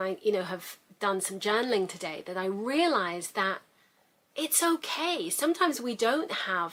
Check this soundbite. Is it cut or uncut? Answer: uncut